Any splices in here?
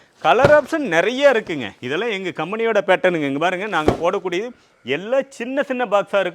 no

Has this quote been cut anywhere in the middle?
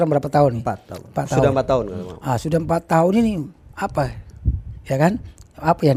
no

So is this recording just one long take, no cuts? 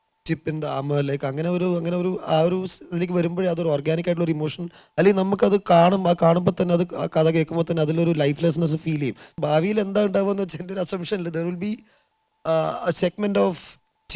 no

